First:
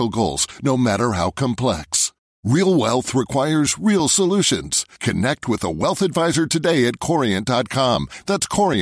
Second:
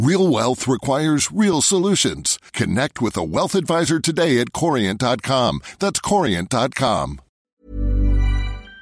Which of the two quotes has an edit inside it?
second; 1 cut; at 7.3 s

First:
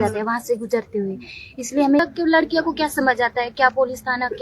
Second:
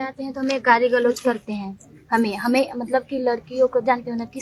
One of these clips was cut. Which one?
first; 1 cut; at 2.0 s

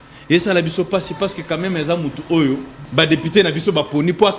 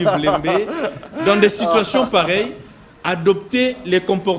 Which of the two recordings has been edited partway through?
first; 1 cut; at 2.8 s

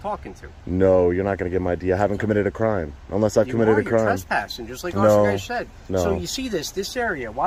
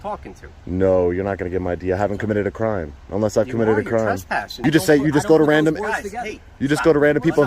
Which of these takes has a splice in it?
second; 1 cut; at 4.6 s

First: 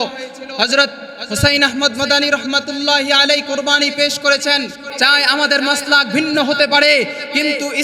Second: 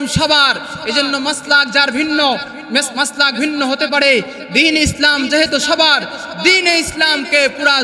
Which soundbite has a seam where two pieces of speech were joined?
first; 1 cut; at 4.8 s

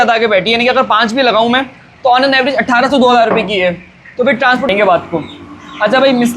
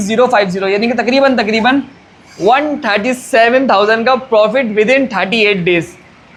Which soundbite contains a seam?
first; 1 cut; at 4.7 s

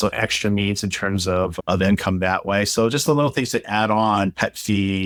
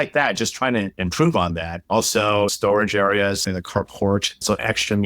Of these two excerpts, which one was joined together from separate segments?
second; 1 cut; at 2.5 s

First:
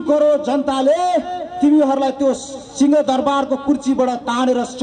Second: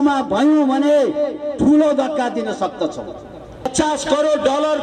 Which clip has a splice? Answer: second; 1 cut; at 3.7 s

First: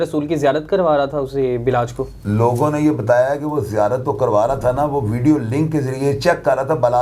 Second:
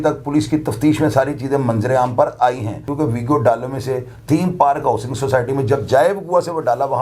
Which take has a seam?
second; 1 cut; at 2.8 s

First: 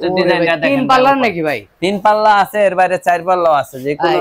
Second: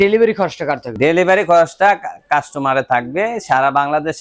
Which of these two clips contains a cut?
second; 1 cut; at 0.9 s

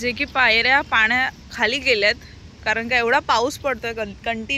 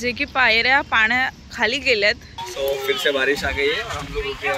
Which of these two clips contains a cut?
second; 1 cut; at 2.3 s

